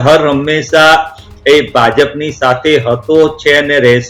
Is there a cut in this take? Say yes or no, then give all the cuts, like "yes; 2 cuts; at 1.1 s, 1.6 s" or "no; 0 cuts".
no; 0 cuts